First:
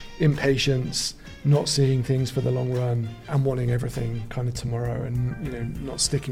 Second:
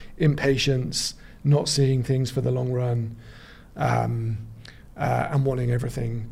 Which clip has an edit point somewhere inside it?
first; 1 cut; at 3.3 s

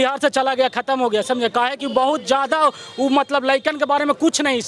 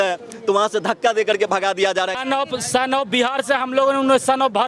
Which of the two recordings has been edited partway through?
second; 1 cut; at 2.2 s

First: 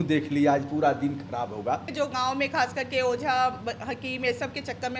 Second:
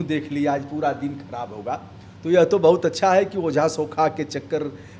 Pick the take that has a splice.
first; 1 cut; at 1.9 s

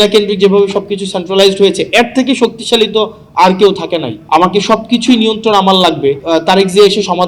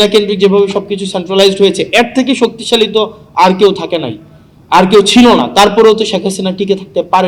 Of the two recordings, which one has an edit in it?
first; 2 cuts; at 4.2 s, 6.2 s

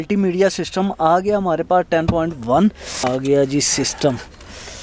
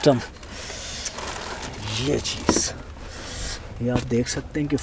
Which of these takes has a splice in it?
first; 1 cut; at 3.1 s

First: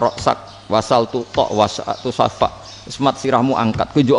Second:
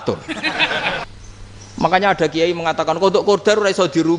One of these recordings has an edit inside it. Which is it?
second; 1 cut; at 1.0 s

